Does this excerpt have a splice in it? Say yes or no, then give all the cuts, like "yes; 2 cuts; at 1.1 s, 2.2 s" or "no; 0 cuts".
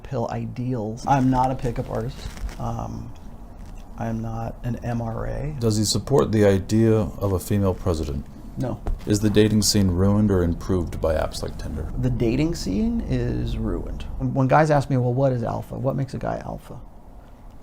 yes; 5 cuts; at 1.0 s, 5.6 s, 8.9 s, 11.9 s, 14.2 s